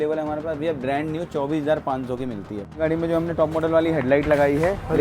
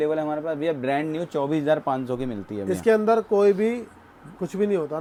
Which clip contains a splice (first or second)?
first